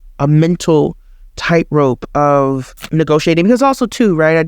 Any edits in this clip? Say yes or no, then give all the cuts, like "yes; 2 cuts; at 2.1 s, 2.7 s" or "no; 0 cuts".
no; 0 cuts